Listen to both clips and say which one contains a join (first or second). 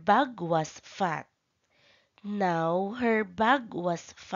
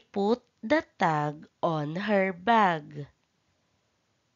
first